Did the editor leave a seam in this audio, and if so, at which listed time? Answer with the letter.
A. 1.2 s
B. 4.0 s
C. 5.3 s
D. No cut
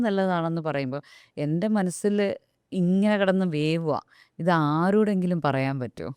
D